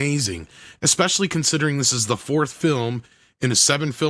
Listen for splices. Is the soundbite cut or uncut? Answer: uncut